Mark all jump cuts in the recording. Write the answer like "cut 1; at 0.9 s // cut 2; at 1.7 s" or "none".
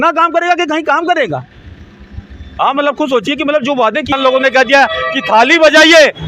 cut 1; at 4.1 s